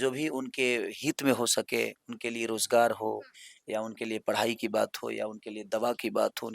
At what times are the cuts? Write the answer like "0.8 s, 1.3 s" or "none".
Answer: none